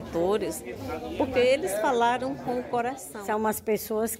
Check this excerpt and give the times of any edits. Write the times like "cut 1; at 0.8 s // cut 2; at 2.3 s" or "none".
cut 1; at 3.1 s